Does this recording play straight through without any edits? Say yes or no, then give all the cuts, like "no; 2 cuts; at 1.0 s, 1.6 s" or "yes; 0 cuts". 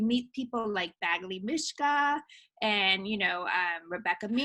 yes; 0 cuts